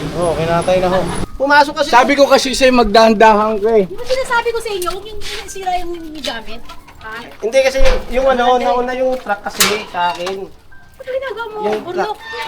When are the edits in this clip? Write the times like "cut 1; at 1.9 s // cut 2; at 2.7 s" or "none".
cut 1; at 1.2 s